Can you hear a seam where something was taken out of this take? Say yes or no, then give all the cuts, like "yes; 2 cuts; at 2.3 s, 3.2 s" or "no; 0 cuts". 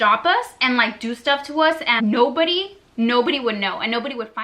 yes; 1 cut; at 2.0 s